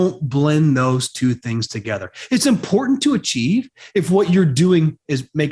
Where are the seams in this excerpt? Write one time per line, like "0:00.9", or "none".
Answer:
none